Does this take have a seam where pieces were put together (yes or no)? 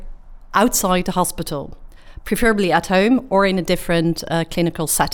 no